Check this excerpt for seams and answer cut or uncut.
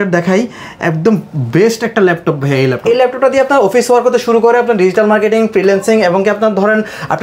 cut